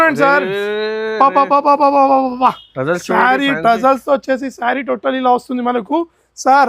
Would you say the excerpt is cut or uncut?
uncut